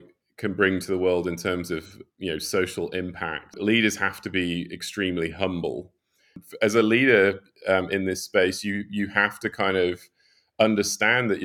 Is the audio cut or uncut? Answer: cut